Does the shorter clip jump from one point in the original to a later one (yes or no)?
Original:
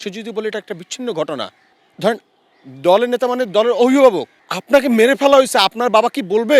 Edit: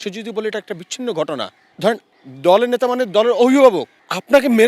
yes